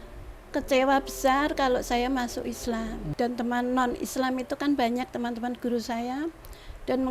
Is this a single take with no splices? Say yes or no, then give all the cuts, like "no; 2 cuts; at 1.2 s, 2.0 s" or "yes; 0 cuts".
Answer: no; 1 cut; at 3.0 s